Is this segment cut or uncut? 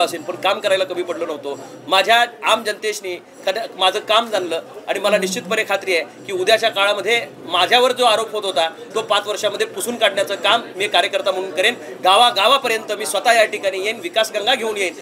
uncut